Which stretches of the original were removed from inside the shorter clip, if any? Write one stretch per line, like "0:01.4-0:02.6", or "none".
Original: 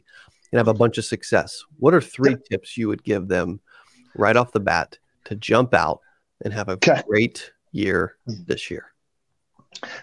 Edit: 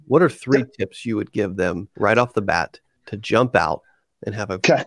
0:03.6-0:04.0